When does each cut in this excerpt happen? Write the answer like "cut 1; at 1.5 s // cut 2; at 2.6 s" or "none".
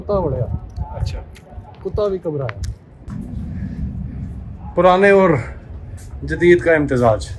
cut 1; at 3.1 s